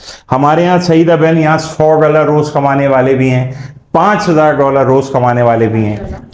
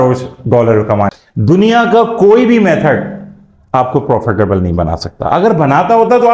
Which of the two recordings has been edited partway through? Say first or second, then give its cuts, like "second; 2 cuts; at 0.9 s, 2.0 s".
second; 1 cut; at 1.1 s